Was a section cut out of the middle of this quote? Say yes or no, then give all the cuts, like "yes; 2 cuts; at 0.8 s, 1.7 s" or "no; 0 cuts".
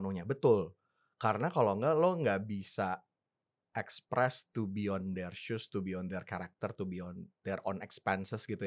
no; 0 cuts